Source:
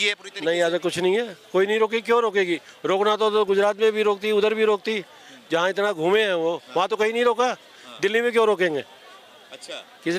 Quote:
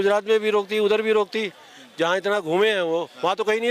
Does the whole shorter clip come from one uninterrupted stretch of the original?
yes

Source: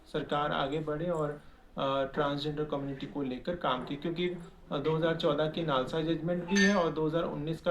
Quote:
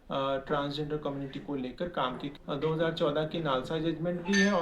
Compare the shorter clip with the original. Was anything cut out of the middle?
yes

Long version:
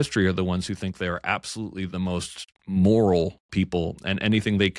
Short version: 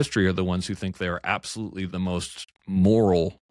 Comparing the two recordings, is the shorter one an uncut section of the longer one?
yes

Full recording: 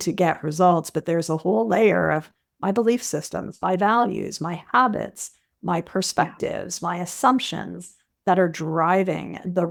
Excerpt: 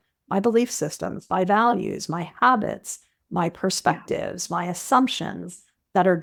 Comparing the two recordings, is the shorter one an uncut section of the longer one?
yes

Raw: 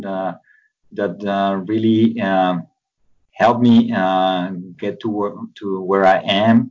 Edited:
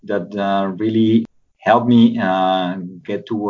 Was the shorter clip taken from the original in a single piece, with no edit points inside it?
no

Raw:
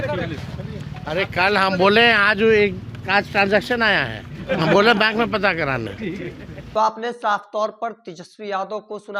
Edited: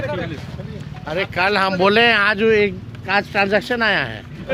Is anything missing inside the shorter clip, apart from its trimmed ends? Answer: no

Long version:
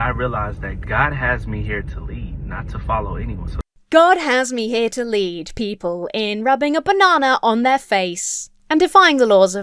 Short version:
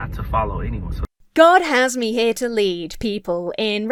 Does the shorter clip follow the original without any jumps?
yes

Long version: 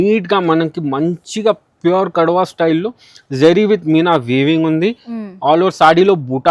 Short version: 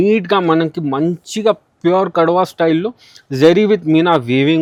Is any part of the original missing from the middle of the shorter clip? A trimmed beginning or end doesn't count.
no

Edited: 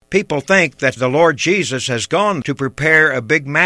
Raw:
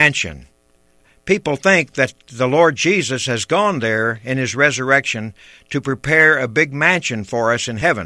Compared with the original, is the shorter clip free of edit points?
no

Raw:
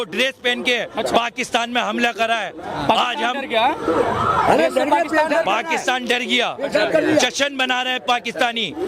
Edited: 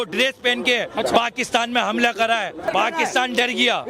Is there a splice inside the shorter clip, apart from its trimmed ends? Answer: yes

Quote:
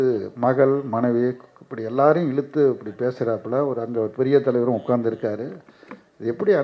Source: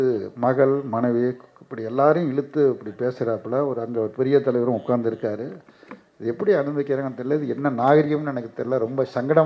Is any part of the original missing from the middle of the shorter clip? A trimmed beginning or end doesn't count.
no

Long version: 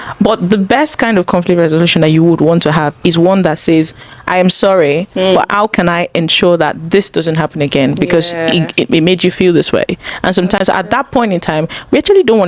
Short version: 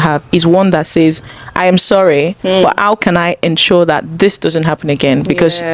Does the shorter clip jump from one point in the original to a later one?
no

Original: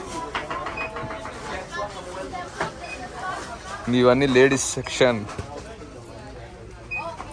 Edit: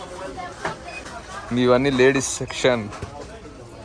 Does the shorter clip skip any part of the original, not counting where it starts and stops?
yes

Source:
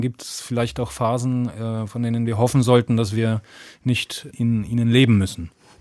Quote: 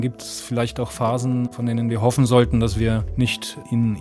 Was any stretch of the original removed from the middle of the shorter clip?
yes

